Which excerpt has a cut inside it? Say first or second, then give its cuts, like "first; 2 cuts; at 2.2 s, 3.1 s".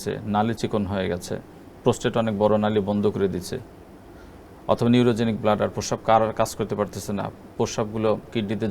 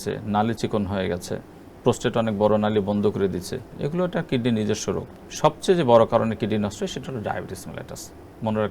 second; 2 cuts; at 3.6 s, 5.2 s